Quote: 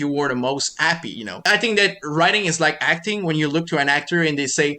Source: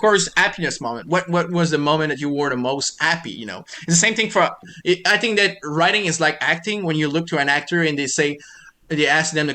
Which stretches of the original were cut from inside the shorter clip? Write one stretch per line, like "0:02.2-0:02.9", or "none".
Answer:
0:03.6-0:05.0